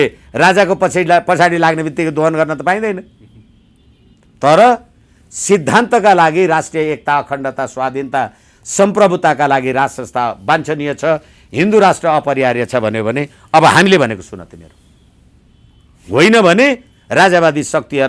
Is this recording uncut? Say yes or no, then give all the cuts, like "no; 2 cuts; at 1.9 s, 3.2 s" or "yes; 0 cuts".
yes; 0 cuts